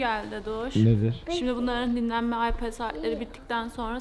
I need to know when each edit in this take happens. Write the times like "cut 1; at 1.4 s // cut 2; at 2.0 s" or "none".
none